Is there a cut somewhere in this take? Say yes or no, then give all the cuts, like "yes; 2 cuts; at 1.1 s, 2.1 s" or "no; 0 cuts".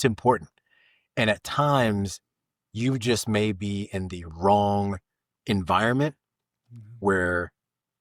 no; 0 cuts